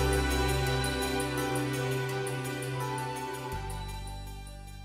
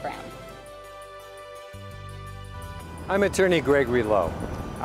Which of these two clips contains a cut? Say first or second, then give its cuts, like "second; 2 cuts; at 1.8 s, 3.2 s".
second; 1 cut; at 2.5 s